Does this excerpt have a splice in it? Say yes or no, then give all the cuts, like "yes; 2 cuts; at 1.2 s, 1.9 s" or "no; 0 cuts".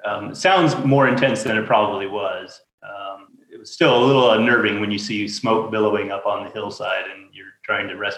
yes; 2 cuts; at 2.7 s, 3.3 s